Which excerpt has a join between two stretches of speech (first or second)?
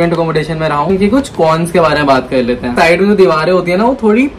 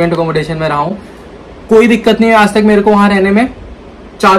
first